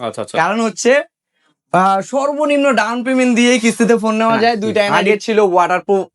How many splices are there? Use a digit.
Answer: 1